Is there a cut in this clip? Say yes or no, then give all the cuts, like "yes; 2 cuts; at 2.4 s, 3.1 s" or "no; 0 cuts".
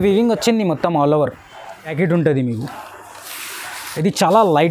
yes; 1 cut; at 1.9 s